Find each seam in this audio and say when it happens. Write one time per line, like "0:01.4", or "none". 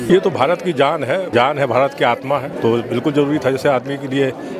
0:01.3
0:02.5